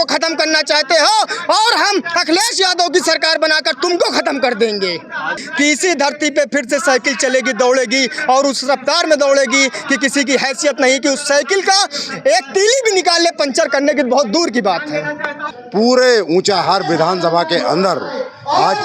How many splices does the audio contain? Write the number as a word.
two